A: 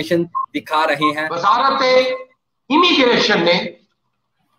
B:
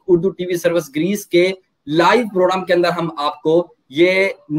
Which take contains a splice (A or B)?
A